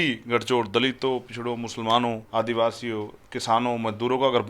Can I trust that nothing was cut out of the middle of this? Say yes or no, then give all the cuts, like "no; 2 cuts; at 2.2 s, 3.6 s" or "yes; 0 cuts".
no; 1 cut; at 2.2 s